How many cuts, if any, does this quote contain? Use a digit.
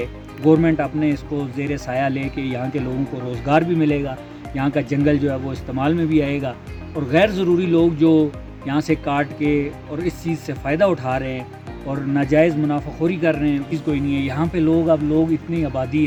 0